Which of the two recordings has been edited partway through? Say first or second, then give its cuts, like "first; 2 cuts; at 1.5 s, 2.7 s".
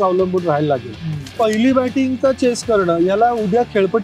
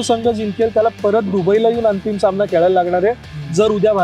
first; 1 cut; at 1.3 s